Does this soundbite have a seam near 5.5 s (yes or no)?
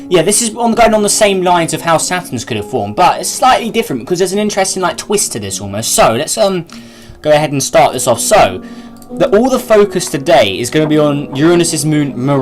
no